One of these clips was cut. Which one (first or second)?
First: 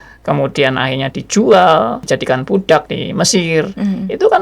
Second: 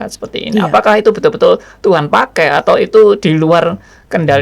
first